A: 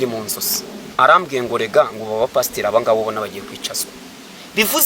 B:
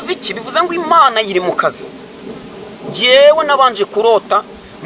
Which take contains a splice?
A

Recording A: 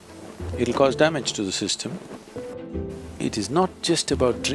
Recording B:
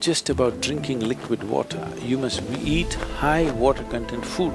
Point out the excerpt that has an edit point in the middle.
A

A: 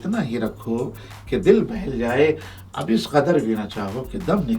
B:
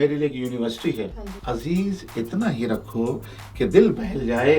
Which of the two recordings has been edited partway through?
B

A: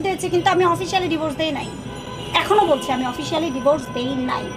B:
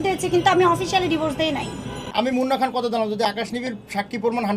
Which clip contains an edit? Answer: B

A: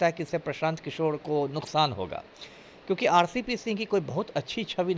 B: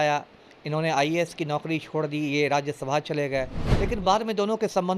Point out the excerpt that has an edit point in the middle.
B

